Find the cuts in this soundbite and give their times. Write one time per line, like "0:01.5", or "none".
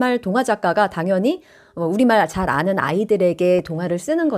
none